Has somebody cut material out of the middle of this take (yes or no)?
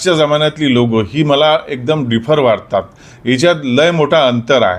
no